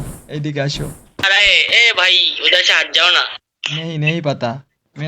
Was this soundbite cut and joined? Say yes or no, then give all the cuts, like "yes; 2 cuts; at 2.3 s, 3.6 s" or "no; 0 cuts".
yes; 1 cut; at 1.2 s